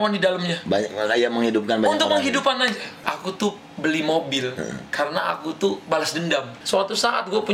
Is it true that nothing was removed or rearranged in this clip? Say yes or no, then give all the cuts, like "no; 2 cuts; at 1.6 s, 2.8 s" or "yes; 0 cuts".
no; 2 cuts; at 2.9 s, 6.5 s